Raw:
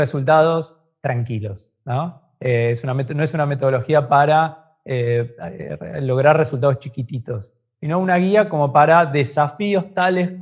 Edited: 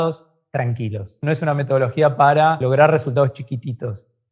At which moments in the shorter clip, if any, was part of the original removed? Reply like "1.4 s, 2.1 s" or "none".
1.2 s, 2.6 s